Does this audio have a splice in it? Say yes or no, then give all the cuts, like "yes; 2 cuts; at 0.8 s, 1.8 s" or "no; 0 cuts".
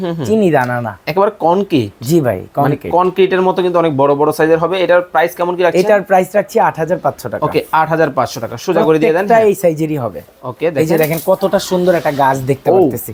no; 0 cuts